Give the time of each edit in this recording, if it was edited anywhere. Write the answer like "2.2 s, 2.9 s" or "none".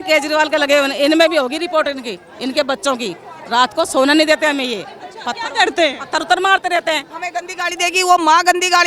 7.1 s